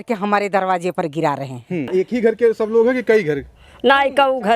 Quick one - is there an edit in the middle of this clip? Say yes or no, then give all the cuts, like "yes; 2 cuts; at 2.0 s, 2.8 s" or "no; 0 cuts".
yes; 1 cut; at 1.9 s